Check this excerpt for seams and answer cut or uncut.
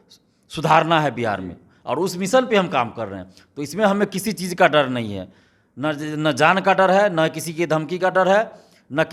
uncut